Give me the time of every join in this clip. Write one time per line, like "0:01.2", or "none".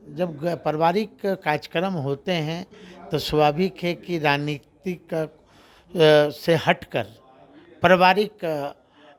none